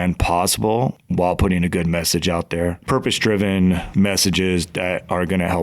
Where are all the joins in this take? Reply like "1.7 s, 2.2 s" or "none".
2.8 s